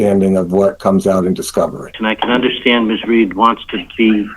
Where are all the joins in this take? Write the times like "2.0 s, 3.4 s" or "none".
1.9 s